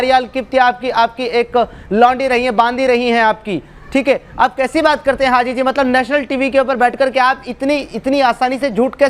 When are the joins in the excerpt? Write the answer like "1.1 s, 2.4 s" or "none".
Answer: none